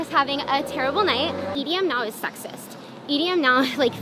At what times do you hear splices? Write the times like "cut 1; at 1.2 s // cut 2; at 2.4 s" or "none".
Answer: cut 1; at 1.5 s